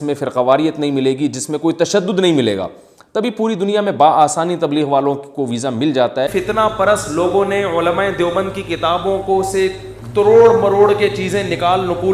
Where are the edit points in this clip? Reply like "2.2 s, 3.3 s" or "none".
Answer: 6.3 s